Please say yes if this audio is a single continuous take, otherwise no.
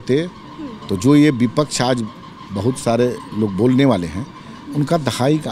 yes